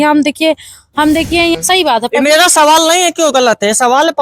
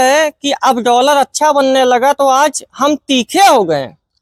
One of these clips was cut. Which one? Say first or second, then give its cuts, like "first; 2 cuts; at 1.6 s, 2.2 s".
first; 1 cut; at 1.6 s